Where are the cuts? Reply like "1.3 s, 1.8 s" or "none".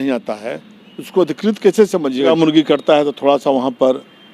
2.3 s